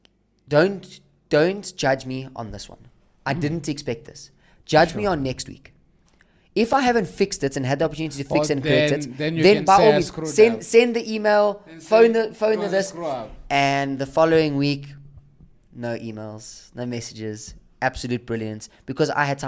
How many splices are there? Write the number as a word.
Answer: zero